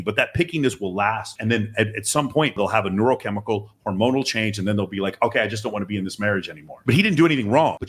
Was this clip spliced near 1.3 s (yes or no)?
yes